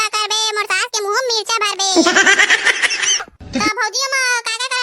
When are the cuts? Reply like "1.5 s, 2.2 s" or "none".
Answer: 3.3 s